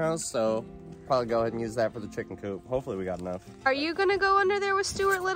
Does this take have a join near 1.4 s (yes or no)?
no